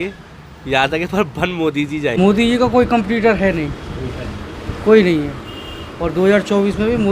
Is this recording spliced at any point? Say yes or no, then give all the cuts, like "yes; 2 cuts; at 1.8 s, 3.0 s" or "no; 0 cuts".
yes; 1 cut; at 2.1 s